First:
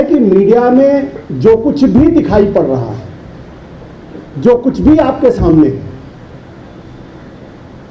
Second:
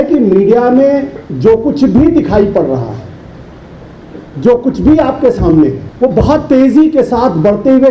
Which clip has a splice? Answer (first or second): second